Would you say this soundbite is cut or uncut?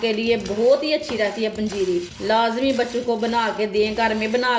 cut